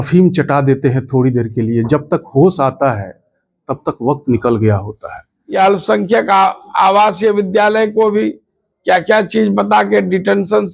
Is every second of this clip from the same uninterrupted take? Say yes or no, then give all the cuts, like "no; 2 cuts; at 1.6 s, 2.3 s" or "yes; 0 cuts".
no; 1 cut; at 5.6 s